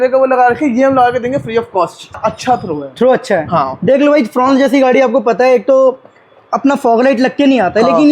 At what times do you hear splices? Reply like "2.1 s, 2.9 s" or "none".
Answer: 2.1 s